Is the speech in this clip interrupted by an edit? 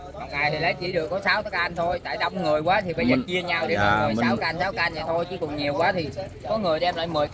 no; 0 cuts

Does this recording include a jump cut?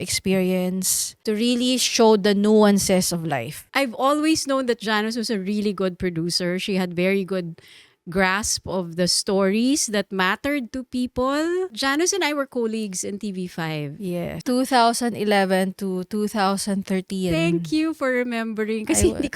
yes; 3 cuts; at 3.7 s, 11.8 s, 14.4 s

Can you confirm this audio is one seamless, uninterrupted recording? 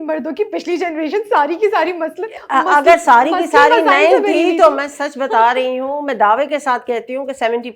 yes; 0 cuts

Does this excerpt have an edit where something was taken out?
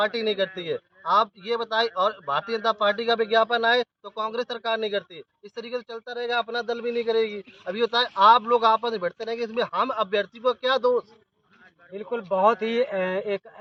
no; 0 cuts

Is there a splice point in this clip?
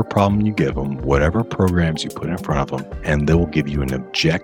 yes; 1 cut; at 2.9 s

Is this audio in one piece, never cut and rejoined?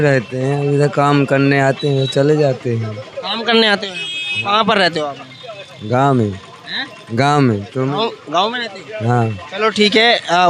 yes; 0 cuts

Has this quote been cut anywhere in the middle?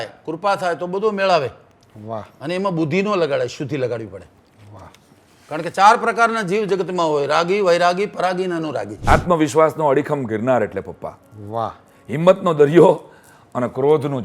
yes; 1 cut; at 8.9 s

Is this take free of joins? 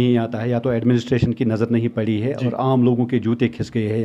yes; 0 cuts

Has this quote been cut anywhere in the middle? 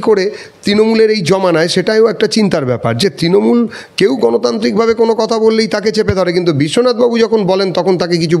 no; 0 cuts

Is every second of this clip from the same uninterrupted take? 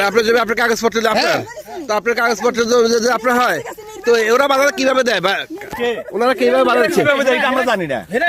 yes; 0 cuts

